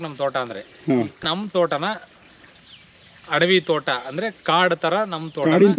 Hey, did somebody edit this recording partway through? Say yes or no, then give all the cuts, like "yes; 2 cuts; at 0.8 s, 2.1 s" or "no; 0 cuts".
yes; 1 cut; at 1.2 s